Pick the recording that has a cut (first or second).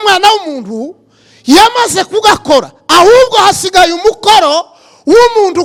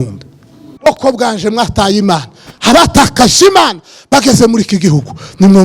second